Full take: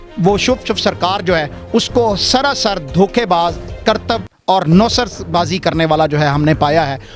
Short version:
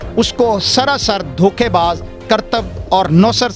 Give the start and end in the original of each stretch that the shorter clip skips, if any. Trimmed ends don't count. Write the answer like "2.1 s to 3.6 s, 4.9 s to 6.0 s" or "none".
none